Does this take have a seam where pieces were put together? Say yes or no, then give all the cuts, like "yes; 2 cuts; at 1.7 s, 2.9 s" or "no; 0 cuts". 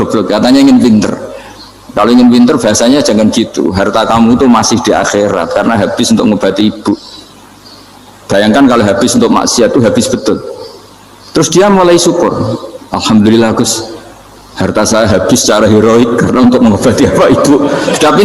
no; 0 cuts